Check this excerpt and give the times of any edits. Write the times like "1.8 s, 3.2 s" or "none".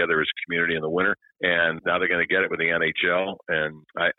1.3 s